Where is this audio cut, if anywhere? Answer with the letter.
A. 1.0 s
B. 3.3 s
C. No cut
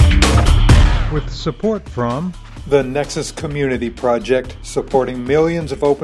A